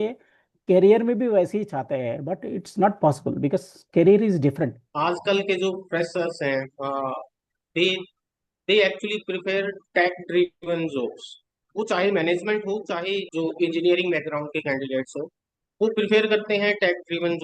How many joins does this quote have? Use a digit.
1